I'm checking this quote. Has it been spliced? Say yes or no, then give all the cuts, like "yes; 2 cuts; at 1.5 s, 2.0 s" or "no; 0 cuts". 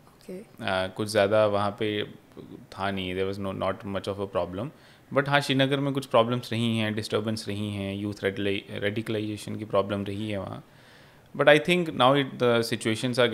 no; 0 cuts